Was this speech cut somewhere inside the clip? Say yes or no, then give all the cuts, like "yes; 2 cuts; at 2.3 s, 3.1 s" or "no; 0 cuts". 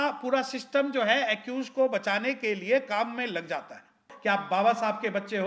yes; 1 cut; at 4.1 s